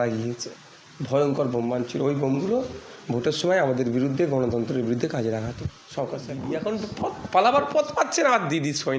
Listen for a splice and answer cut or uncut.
cut